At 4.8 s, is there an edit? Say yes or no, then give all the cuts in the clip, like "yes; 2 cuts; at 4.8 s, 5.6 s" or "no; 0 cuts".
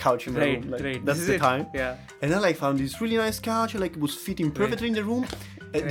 no; 1 cut; at 2.1 s